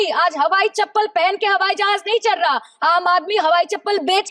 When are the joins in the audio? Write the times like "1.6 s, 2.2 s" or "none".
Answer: none